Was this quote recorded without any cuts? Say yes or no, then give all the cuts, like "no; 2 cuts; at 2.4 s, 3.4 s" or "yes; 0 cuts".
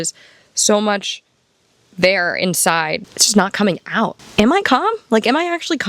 no; 2 cuts; at 3.0 s, 4.2 s